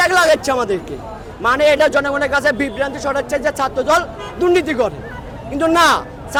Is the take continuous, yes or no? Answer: yes